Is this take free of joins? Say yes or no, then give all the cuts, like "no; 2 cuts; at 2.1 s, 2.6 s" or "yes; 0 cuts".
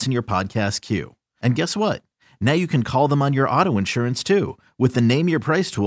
yes; 0 cuts